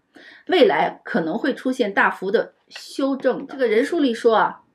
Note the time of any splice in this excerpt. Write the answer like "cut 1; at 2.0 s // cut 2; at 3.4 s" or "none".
cut 1; at 3.5 s